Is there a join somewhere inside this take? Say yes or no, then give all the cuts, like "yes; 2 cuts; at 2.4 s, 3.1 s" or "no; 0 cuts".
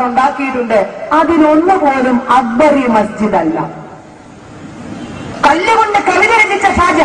yes; 1 cut; at 4.4 s